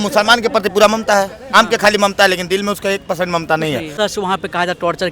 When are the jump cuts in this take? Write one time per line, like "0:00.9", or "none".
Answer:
0:01.5
0:03.9